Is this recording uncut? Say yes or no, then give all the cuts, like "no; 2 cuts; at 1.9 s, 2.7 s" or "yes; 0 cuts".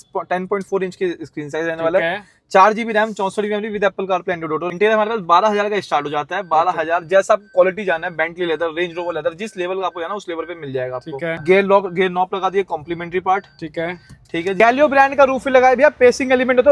no; 3 cuts; at 4.7 s, 11.4 s, 14.6 s